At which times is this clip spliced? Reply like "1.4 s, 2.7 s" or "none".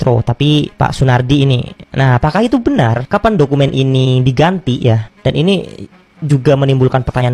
none